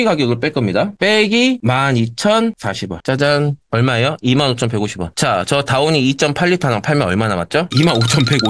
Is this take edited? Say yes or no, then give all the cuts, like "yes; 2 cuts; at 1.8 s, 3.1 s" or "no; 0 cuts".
no; 0 cuts